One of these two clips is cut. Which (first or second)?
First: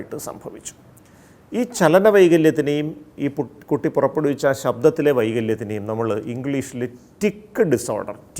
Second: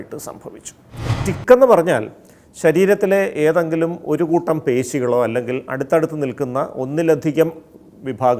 second